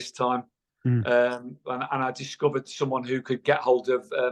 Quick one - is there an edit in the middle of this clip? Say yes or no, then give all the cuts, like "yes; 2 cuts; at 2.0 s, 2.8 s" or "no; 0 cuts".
no; 0 cuts